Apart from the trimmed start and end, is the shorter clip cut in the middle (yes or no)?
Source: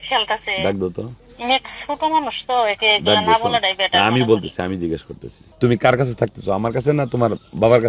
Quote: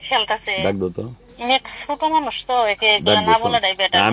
no